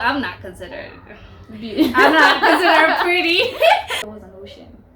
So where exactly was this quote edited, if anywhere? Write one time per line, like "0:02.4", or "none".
0:04.0